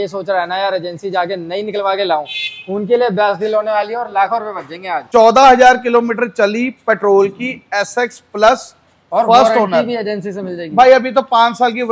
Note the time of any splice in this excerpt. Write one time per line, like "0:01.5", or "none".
0:05.0

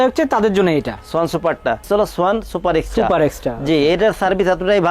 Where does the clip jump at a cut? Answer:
0:01.8

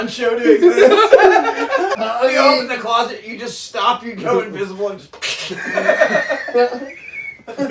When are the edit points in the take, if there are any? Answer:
0:02.0

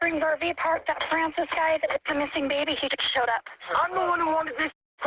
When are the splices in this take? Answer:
0:03.6

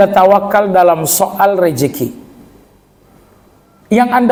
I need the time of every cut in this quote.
none

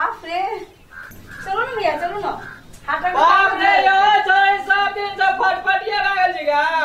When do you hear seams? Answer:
0:01.1

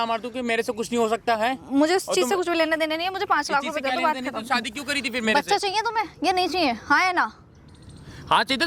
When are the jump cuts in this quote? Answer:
none

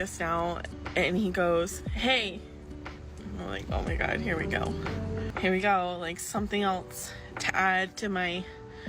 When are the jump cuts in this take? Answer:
none

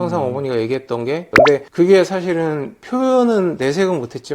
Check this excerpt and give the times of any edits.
0:01.3

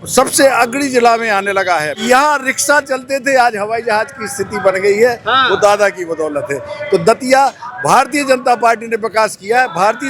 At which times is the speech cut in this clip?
0:01.9

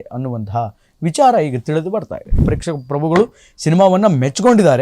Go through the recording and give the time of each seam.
0:02.4

